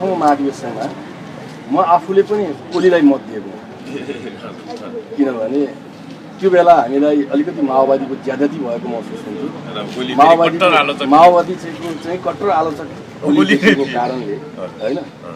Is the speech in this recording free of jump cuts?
yes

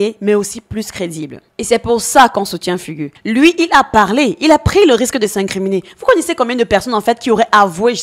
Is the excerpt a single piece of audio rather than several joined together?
yes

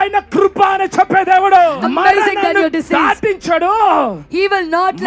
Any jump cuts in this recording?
yes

